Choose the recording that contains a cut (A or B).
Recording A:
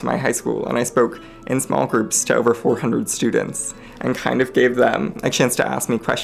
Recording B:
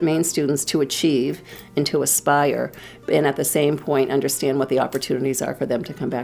A